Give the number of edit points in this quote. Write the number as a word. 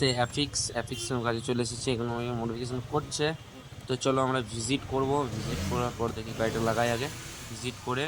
zero